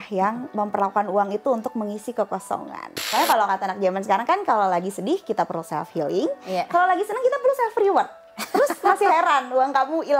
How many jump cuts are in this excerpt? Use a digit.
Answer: 1